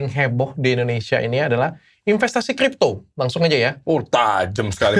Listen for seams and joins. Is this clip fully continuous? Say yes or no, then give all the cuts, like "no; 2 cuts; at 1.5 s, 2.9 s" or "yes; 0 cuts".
yes; 0 cuts